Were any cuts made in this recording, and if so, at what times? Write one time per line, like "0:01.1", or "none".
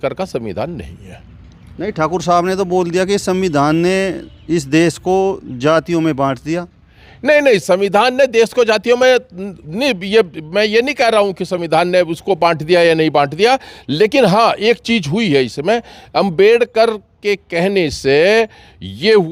none